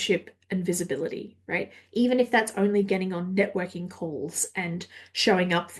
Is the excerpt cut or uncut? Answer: uncut